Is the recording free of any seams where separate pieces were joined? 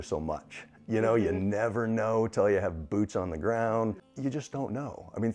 no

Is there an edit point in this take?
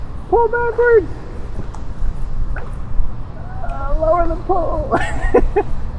no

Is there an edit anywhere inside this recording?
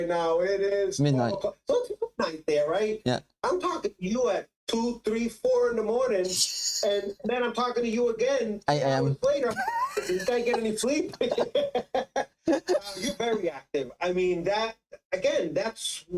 no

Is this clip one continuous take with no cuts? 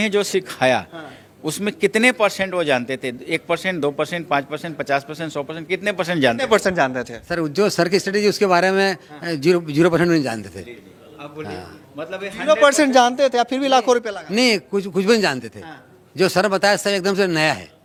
yes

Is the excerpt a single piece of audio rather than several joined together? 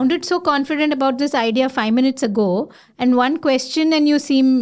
yes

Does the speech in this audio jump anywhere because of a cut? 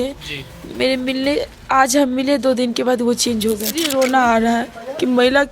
yes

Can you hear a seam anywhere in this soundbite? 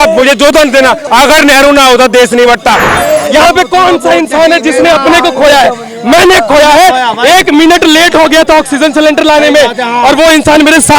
yes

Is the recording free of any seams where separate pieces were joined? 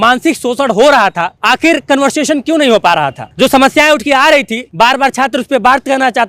no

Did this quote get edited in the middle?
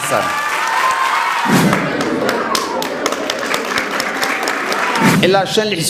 yes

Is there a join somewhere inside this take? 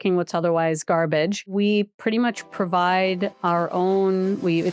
yes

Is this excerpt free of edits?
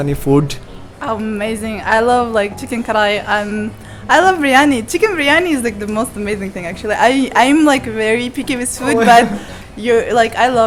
yes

